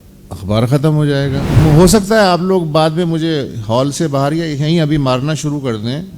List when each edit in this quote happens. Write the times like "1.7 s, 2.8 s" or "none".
1.5 s